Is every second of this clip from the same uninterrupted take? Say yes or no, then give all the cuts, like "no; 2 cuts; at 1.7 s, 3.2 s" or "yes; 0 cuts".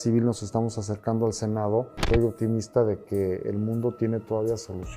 no; 1 cut; at 2.0 s